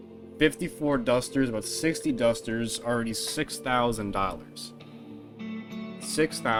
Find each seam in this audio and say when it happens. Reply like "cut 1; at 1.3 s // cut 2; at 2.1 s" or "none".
none